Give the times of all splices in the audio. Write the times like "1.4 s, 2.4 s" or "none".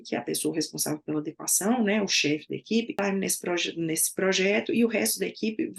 2.9 s